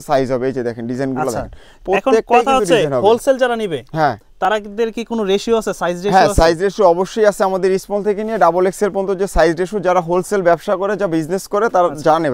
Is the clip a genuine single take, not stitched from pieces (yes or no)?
yes